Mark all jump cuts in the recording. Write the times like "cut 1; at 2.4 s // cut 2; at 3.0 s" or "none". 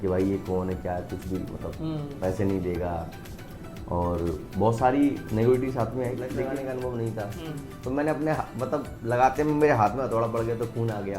cut 1; at 6.5 s